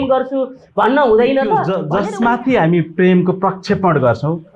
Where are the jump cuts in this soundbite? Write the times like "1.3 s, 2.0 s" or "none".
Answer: 1.8 s